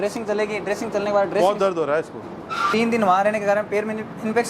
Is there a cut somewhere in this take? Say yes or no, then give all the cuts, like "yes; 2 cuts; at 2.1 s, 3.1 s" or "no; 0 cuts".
yes; 1 cut; at 2.7 s